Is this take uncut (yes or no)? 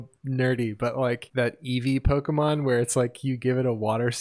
no